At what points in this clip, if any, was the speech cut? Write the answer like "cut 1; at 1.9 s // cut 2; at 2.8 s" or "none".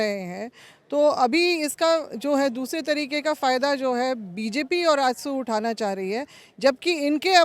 none